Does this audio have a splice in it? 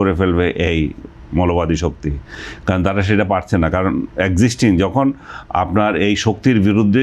no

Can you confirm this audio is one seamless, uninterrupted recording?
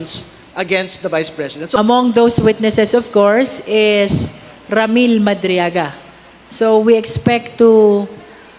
no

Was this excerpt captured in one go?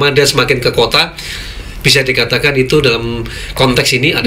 yes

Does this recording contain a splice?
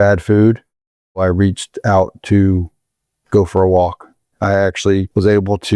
yes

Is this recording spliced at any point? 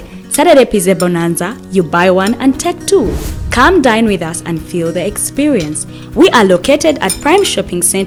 no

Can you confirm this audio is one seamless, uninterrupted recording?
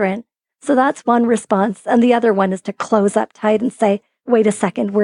yes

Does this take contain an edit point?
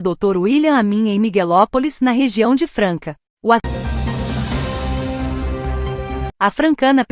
yes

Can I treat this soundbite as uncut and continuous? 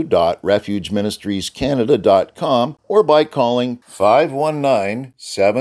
no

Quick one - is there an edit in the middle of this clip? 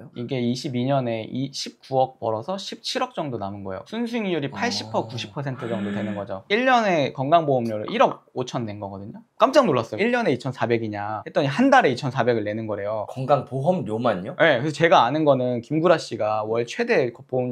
yes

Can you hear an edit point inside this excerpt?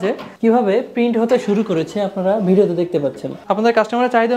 yes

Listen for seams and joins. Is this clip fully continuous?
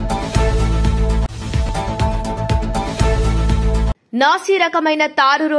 yes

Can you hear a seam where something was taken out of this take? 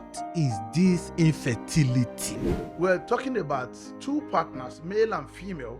yes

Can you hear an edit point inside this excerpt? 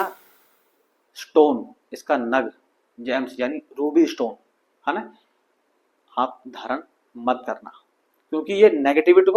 no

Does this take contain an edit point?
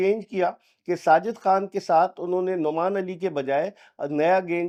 no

